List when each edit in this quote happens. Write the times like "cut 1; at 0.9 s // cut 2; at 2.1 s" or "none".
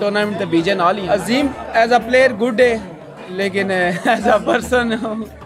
cut 1; at 1.0 s